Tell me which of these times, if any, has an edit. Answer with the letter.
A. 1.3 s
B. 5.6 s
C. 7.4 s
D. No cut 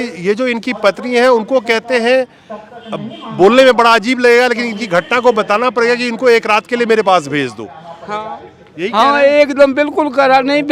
D